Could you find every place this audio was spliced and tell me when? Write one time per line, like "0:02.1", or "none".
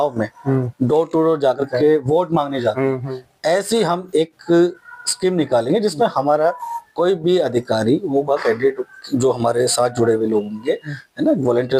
none